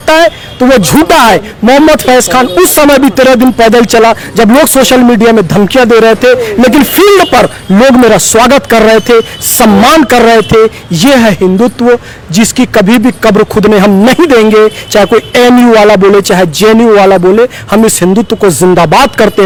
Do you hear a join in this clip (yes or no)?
no